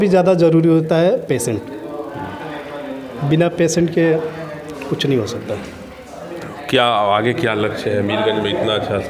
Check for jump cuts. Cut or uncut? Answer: uncut